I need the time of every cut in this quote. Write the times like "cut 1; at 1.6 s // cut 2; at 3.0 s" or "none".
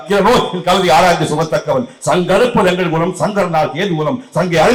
none